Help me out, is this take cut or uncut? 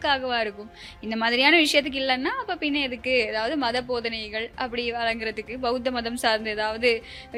uncut